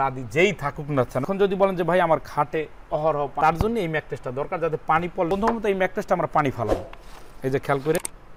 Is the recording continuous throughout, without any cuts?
yes; 0 cuts

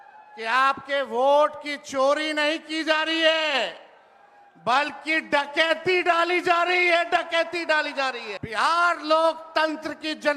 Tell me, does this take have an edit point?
yes; 1 cut; at 8.3 s

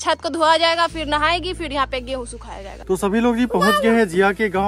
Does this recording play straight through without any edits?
no; 1 cut; at 2.8 s

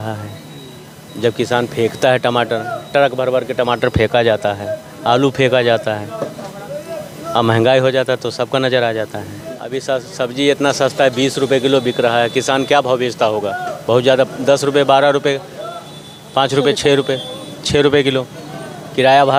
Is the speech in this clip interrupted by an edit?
no; 0 cuts

